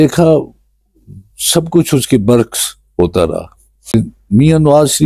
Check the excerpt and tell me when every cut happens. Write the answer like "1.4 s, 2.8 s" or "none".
3.9 s